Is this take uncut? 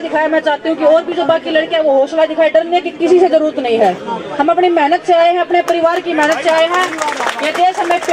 yes; 0 cuts

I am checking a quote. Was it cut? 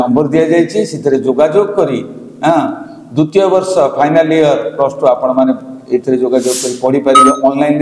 no; 0 cuts

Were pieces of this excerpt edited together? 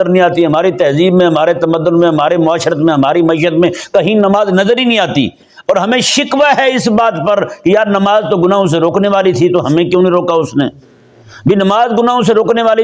no; 0 cuts

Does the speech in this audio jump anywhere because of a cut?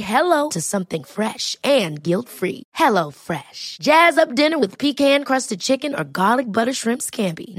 no; 0 cuts

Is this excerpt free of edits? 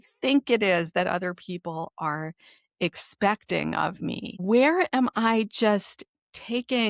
no; 1 cut; at 4.3 s

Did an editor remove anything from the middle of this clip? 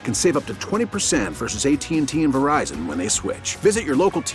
no; 0 cuts

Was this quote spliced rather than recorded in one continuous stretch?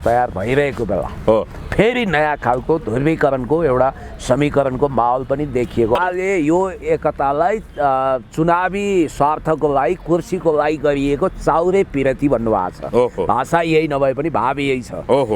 yes; 1 cut; at 6.0 s

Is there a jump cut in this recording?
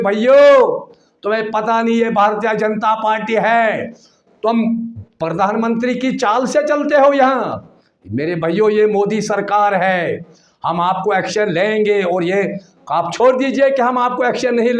no; 0 cuts

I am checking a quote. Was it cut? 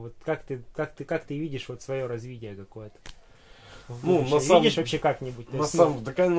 no; 0 cuts

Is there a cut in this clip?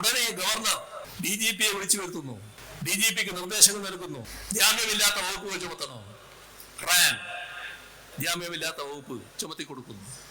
yes; 3 cuts; at 1.1 s, 2.6 s, 4.3 s

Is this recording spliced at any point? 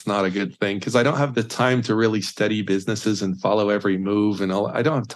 yes; 1 cut; at 1.3 s

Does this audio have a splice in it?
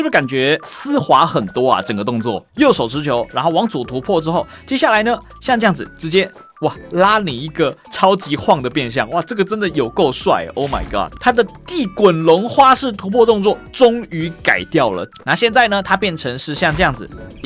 yes; 3 cuts; at 2.4 s, 11.1 s, 15.1 s

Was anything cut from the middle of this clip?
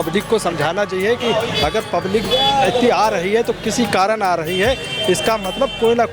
no; 0 cuts

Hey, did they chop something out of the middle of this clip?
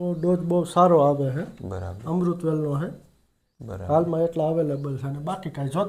no; 0 cuts

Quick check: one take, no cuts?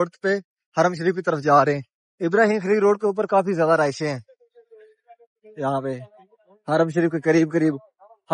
yes; 0 cuts

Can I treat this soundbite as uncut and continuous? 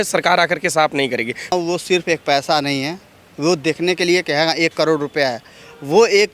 no; 1 cut; at 1.5 s

